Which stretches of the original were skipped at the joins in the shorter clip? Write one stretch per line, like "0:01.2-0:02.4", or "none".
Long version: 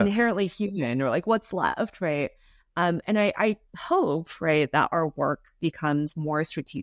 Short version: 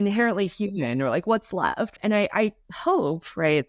0:02.0-0:03.0